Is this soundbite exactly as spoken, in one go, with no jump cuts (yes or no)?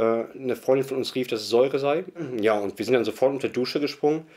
no